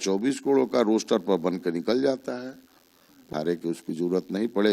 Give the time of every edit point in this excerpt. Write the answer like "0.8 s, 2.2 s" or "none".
3.2 s